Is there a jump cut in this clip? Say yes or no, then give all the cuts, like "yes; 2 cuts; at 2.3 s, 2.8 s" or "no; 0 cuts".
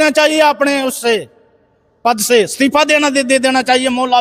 no; 0 cuts